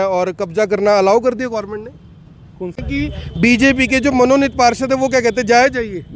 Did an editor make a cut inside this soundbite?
yes; 1 cut; at 2.8 s

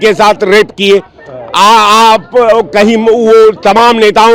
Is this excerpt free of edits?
yes; 0 cuts

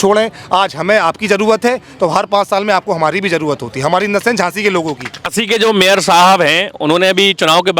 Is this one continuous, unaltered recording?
no; 1 cut; at 5.3 s

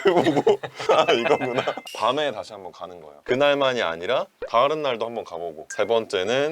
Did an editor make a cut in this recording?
yes; 1 cut; at 5.6 s

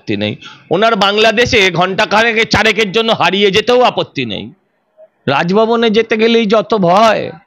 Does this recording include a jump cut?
no; 0 cuts

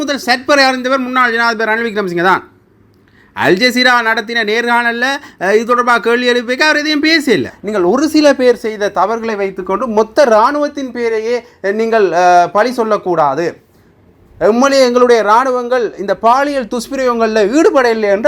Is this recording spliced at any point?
yes; 1 cut; at 7.6 s

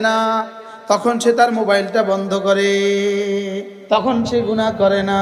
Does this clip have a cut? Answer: yes; 1 cut; at 3.8 s

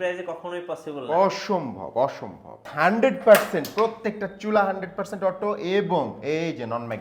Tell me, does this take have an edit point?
yes; 1 cut; at 2.7 s

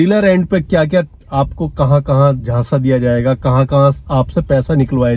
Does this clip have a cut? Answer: no; 0 cuts

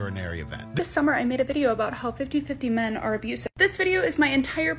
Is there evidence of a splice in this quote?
yes; 2 cuts; at 0.8 s, 3.6 s

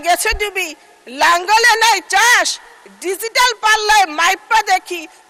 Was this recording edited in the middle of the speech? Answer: no; 0 cuts

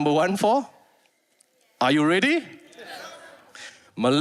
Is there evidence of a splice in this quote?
no; 0 cuts

